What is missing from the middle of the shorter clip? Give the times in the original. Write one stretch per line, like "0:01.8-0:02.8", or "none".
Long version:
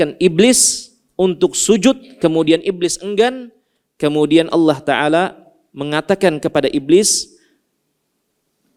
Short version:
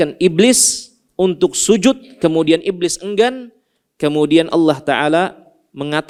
none